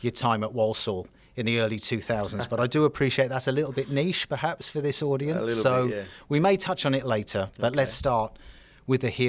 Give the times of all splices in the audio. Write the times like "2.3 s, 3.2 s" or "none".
none